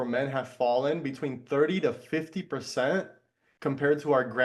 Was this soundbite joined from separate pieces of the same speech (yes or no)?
no